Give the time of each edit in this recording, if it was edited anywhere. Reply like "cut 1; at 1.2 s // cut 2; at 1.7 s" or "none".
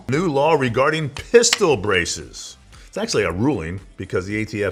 none